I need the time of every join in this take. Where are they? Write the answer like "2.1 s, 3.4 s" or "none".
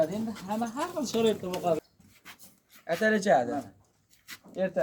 1.8 s

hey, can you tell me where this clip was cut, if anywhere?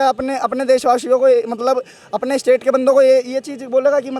none

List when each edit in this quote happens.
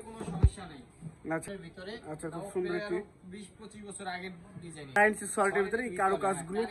1.4 s, 5.0 s

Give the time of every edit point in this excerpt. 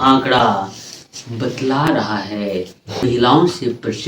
3.1 s

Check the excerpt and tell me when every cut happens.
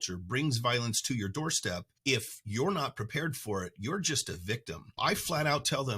1.9 s, 5.0 s

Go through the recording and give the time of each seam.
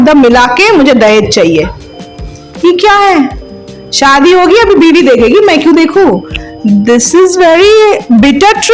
none

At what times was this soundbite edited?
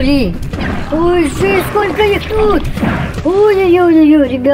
none

